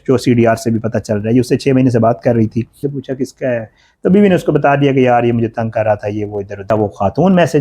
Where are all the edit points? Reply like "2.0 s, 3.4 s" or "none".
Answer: 2.9 s, 6.7 s